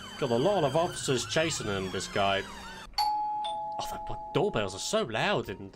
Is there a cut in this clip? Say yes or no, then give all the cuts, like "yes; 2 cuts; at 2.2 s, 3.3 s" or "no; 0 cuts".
yes; 1 cut; at 2.8 s